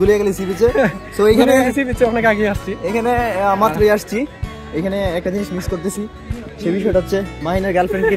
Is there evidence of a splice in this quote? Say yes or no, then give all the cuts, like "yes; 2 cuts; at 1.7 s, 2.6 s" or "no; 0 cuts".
no; 0 cuts